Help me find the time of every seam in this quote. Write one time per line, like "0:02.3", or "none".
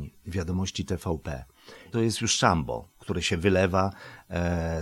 0:01.9